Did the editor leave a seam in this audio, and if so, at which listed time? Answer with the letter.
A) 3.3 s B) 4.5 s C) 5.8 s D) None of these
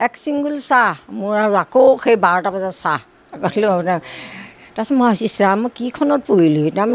D